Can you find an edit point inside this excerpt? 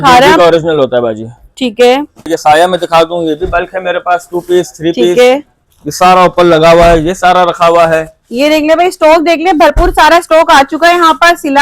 yes; 1 cut; at 2.3 s

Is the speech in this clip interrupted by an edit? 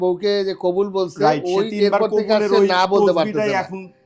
no; 0 cuts

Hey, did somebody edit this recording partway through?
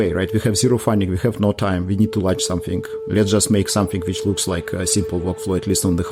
no; 0 cuts

